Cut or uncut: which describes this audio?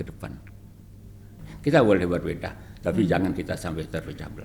cut